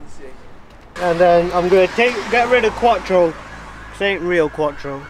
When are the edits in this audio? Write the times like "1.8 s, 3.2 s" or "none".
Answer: 0.9 s